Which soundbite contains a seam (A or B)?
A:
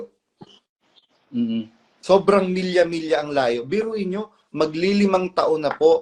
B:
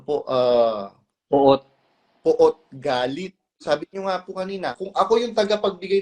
B